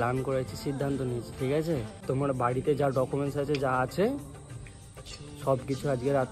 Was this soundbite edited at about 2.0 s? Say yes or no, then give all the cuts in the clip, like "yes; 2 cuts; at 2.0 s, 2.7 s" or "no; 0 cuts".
yes; 1 cut; at 2.0 s